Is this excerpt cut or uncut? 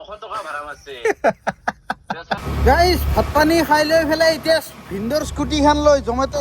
cut